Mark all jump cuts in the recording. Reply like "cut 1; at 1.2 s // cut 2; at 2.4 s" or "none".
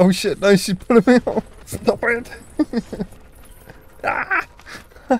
cut 1; at 1.7 s